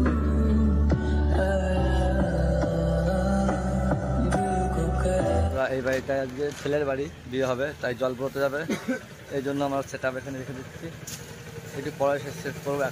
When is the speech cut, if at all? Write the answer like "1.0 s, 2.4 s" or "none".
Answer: 5.5 s